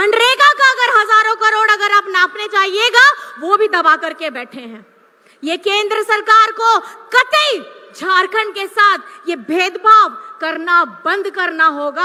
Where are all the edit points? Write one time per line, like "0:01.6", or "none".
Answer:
none